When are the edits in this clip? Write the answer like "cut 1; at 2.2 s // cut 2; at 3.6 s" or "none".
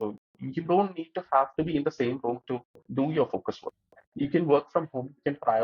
cut 1; at 2.8 s